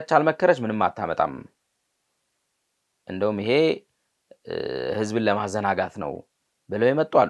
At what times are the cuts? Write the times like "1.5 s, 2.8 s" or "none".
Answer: none